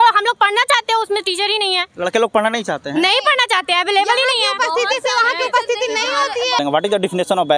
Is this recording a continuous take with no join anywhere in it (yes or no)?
no